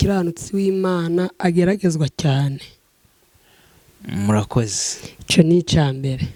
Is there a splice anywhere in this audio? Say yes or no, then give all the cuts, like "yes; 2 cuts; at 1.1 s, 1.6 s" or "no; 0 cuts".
no; 0 cuts